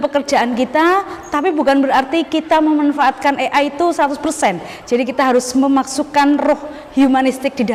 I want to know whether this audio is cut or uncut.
uncut